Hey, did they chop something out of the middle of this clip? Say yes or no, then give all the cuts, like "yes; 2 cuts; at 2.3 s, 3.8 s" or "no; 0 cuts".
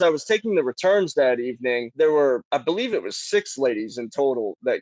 yes; 2 cuts; at 1.9 s, 2.4 s